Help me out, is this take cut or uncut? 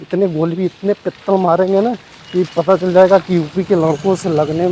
uncut